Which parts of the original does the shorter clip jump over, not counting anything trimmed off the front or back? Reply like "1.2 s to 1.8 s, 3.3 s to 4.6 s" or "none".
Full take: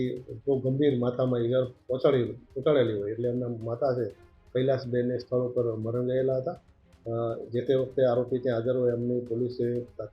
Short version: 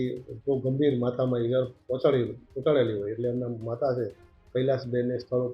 none